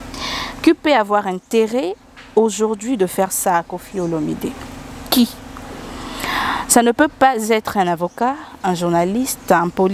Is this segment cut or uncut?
uncut